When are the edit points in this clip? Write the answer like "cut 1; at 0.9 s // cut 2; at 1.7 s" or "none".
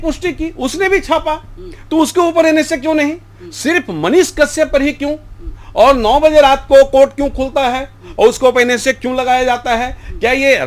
none